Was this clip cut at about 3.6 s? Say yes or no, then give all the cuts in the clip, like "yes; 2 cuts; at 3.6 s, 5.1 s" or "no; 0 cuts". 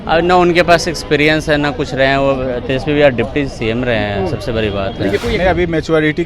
no; 1 cut; at 5.2 s